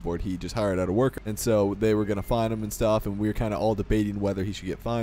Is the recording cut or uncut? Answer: cut